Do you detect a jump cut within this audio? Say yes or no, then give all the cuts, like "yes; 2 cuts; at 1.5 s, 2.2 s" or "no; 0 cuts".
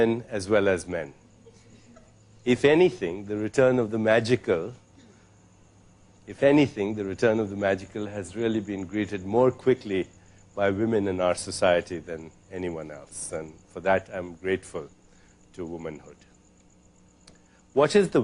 no; 0 cuts